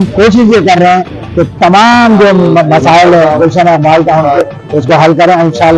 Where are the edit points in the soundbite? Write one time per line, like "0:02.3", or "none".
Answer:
none